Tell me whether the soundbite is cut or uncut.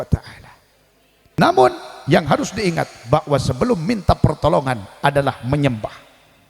cut